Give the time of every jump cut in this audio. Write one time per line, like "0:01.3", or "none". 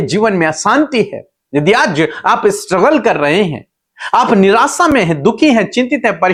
none

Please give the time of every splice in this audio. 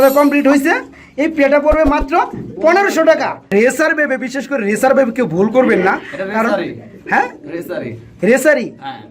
0:03.5

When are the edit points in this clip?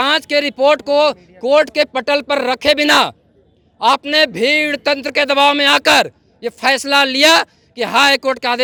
none

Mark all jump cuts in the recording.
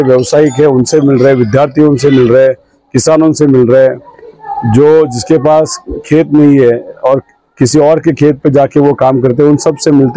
none

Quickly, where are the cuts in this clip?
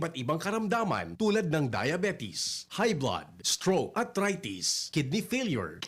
none

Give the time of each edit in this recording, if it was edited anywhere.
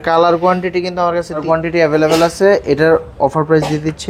0:01.4

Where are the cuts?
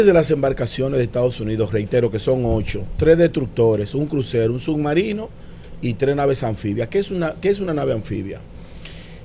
none

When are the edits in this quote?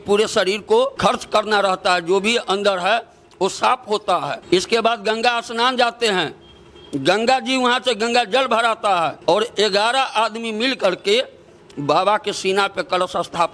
0:00.9
0:04.4
0:09.2

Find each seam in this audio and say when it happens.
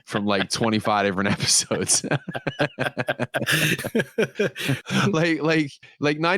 0:04.8

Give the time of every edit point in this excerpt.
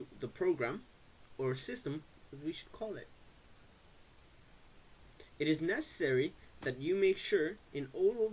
0:06.5

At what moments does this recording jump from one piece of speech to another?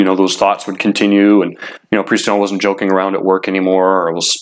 none

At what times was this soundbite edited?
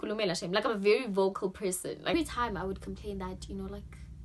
0:02.1

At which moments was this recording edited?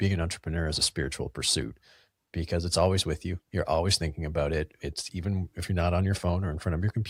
none

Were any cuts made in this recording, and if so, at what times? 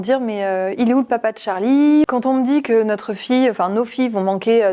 0:02.1

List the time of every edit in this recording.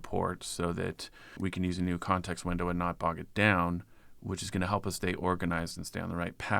0:01.4

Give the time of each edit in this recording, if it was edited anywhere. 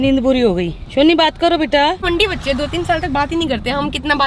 0:00.9
0:02.0

